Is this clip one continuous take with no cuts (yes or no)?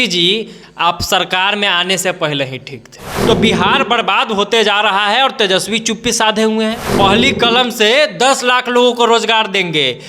no